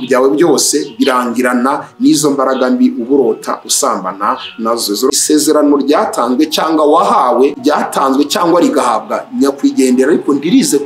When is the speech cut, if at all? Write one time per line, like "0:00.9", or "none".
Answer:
0:05.1
0:07.6